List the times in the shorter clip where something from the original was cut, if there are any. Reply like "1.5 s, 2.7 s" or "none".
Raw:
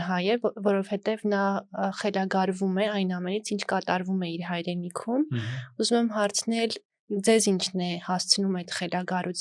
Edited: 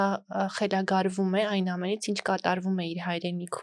none